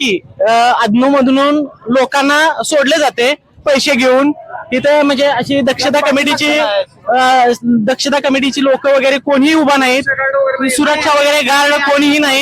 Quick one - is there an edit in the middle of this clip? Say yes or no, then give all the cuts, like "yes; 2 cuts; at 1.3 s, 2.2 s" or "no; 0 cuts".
no; 0 cuts